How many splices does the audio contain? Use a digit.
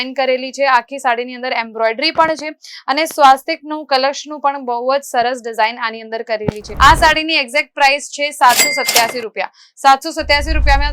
1